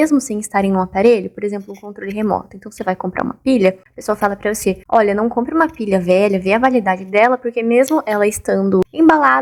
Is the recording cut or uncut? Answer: uncut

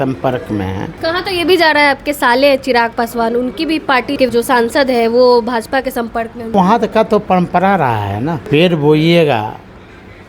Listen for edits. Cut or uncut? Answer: cut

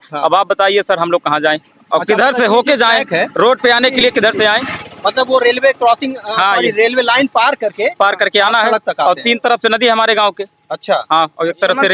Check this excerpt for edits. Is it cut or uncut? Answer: uncut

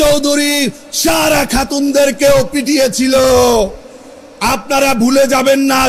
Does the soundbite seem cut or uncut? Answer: uncut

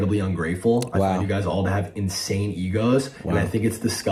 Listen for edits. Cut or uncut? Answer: uncut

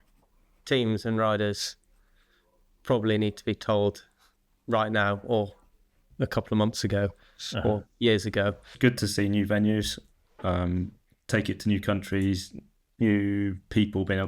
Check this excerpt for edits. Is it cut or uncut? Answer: cut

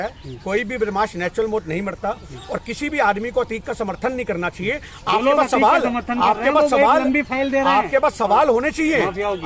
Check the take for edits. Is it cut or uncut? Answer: uncut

